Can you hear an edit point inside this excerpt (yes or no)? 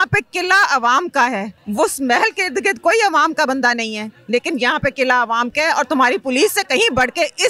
yes